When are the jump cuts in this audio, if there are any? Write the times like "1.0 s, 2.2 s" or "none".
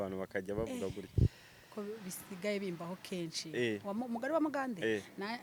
none